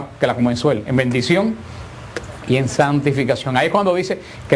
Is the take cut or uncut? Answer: cut